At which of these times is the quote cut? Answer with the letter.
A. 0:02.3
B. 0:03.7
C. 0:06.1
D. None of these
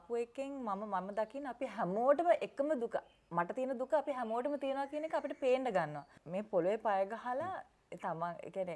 C